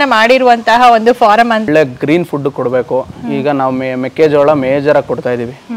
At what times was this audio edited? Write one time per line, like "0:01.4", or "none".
0:01.7